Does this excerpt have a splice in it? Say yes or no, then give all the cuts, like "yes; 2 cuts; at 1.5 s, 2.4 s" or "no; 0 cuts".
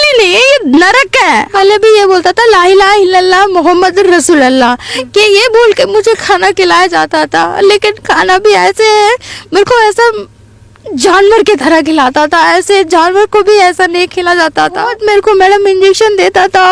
yes; 2 cuts; at 1.5 s, 14.9 s